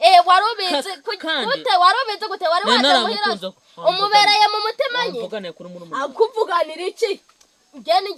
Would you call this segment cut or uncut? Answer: uncut